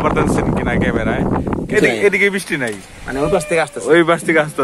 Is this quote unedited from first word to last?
no; 1 cut; at 1.7 s

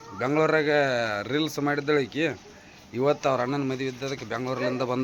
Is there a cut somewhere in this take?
no; 0 cuts

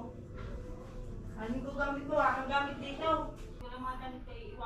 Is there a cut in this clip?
yes; 1 cut; at 3.5 s

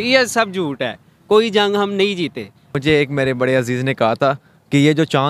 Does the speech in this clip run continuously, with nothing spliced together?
no; 1 cut; at 2.7 s

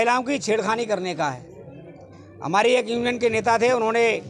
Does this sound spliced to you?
no; 0 cuts

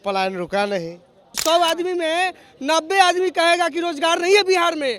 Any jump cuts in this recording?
yes; 1 cut; at 1.4 s

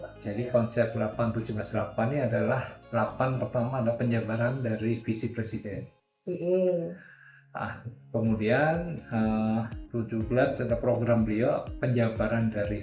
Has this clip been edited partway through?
no; 0 cuts

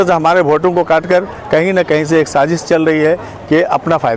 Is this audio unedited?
yes; 0 cuts

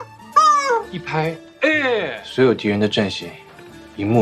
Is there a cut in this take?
yes; 1 cut; at 2.2 s

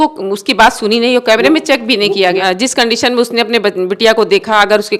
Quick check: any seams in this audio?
yes; 1 cut; at 2.4 s

